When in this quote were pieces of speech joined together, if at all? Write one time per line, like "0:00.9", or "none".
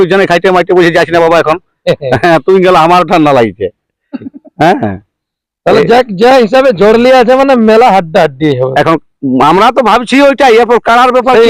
none